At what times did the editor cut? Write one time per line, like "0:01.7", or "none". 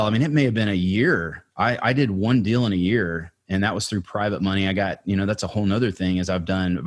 none